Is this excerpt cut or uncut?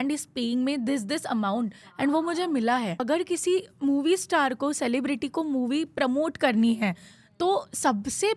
cut